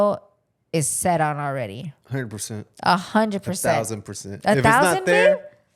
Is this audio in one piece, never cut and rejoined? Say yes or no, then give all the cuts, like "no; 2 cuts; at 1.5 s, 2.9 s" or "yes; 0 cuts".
yes; 0 cuts